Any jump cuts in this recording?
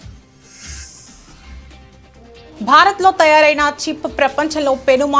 yes; 1 cut; at 2.6 s

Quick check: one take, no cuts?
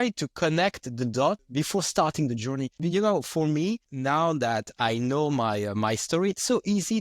no; 3 cuts; at 1.4 s, 2.8 s, 3.9 s

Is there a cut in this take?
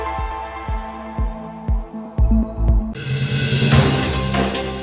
yes; 1 cut; at 3.0 s

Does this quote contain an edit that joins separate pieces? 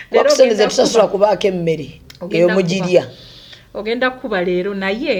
no; 0 cuts

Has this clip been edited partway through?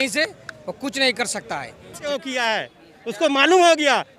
yes; 1 cut; at 2.0 s

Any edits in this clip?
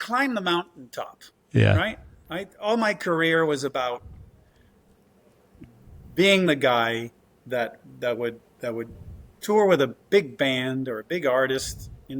no; 0 cuts

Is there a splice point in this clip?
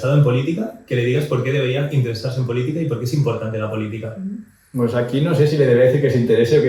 no; 0 cuts

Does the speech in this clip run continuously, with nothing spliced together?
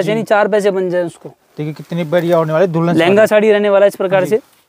yes; 0 cuts

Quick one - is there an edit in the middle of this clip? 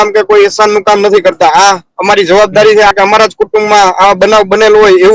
yes; 1 cut; at 2.9 s

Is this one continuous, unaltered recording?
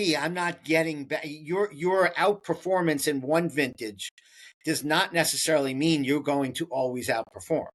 yes; 0 cuts

